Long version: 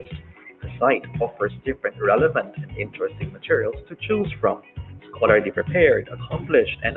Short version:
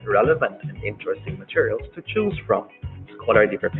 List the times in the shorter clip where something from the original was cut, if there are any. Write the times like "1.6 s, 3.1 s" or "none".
none